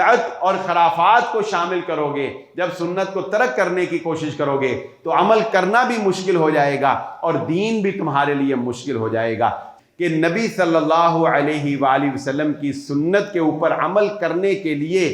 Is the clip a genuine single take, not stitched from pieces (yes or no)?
no